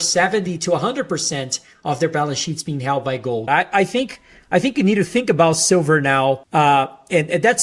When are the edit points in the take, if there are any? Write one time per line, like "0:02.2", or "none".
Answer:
0:03.5
0:06.4